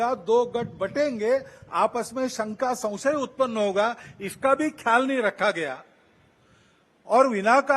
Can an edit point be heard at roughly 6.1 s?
no; 0 cuts

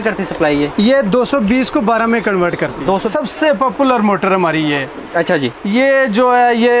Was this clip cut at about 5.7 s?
no; 1 cut; at 3.1 s

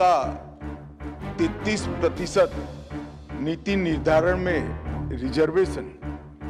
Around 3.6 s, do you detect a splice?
no; 0 cuts

